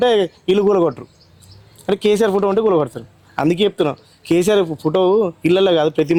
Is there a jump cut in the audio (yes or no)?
no